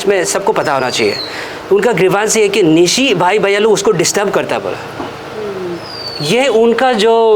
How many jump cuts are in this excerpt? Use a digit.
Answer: 0